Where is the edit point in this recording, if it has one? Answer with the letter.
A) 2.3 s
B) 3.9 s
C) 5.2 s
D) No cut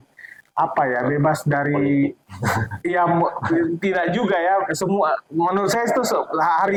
D